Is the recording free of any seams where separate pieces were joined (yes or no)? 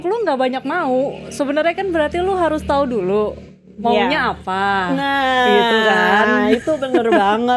yes